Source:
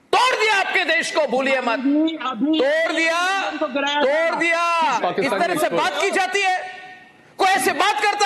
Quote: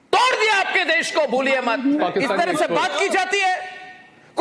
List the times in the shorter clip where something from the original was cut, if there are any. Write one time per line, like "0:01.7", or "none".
0:02.0

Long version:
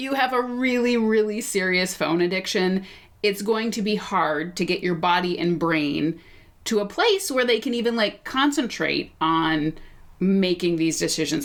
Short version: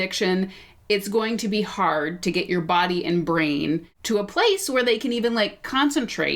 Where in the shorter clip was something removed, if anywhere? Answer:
0:03.9

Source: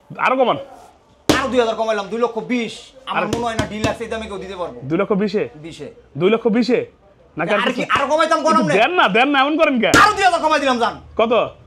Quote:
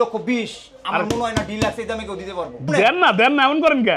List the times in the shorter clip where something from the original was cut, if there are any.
0:02.7

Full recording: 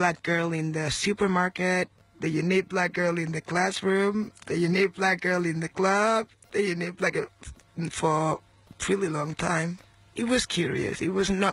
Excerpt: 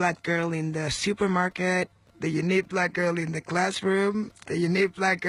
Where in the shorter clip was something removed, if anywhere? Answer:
none

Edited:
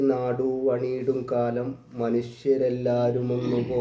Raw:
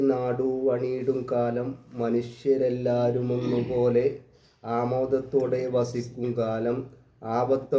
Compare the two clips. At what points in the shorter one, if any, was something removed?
none

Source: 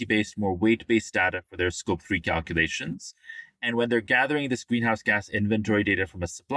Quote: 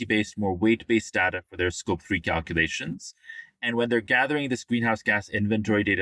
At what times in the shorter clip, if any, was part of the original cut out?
none

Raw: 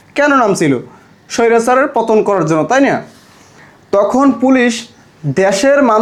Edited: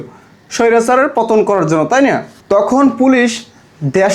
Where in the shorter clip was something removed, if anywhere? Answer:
0:02.3

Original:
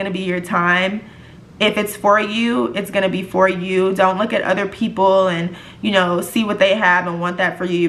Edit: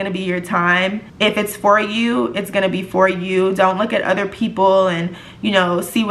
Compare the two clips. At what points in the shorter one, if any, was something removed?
0:01.1

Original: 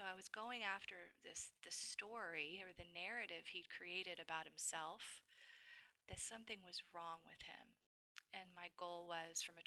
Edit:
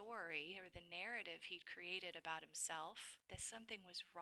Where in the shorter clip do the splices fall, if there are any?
0:03.1

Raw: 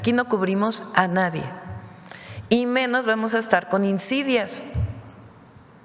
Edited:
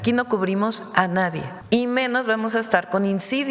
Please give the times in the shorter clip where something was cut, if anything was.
0:01.5

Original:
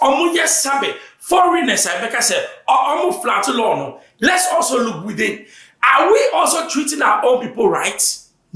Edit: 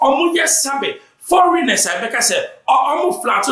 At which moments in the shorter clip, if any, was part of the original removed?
none

